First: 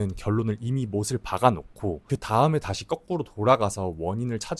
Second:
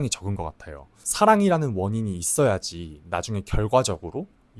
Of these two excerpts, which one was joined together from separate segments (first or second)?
second